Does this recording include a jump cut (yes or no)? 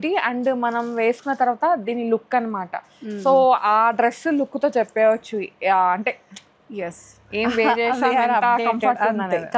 no